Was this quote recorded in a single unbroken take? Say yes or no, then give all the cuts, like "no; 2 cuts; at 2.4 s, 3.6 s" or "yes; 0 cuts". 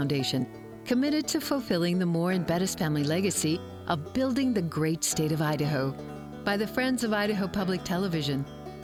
yes; 0 cuts